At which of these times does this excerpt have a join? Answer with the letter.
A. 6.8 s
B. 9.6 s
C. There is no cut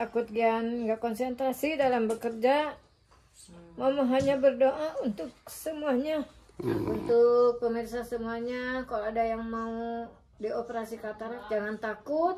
A